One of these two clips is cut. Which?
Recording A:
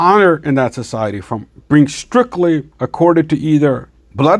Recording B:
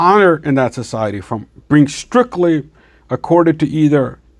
A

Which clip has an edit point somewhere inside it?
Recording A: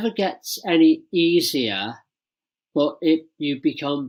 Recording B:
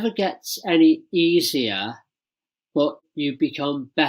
B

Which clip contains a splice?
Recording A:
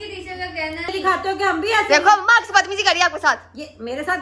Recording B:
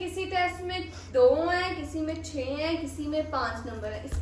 A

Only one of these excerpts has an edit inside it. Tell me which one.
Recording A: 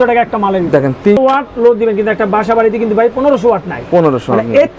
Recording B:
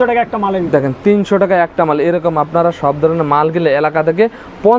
A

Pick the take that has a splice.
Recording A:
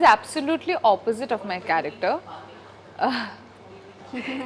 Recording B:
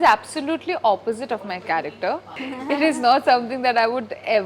B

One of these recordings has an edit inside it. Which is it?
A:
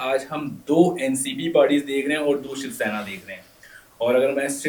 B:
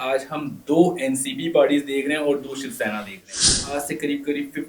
B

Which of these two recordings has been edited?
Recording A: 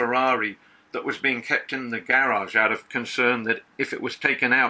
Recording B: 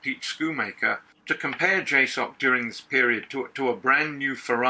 B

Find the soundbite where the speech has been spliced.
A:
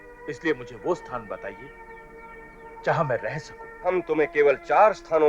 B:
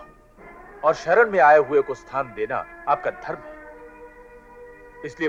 A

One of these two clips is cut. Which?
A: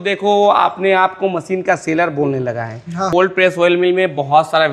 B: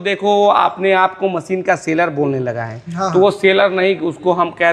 A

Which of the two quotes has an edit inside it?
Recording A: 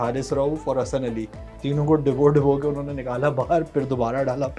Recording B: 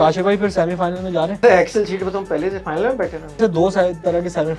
B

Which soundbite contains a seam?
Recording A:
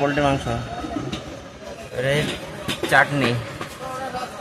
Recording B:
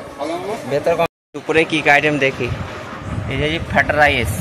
B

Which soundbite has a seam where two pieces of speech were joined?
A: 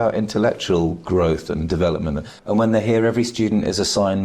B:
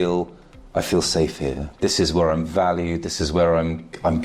A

